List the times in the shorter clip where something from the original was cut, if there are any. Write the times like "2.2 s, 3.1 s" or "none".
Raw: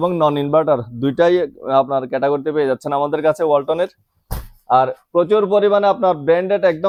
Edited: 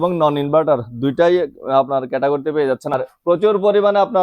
2.9 s